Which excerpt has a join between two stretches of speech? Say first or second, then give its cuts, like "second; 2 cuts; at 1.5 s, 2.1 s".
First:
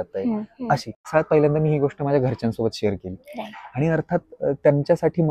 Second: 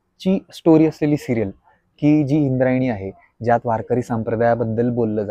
first; 1 cut; at 1.0 s